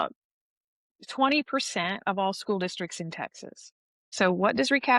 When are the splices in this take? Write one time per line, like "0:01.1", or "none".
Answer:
0:04.1